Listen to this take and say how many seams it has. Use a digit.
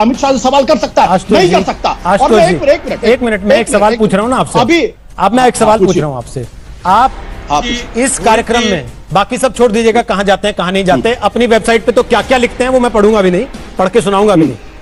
0